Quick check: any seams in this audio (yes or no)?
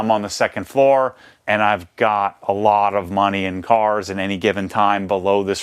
yes